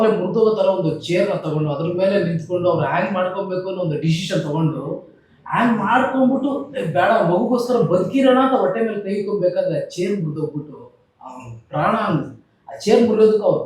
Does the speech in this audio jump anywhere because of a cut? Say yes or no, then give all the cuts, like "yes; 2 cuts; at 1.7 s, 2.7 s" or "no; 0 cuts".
no; 0 cuts